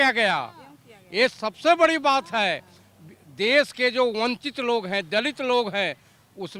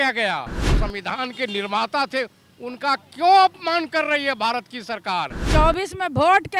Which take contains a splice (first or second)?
second